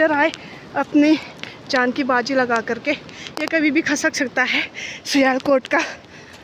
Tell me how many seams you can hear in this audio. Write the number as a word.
zero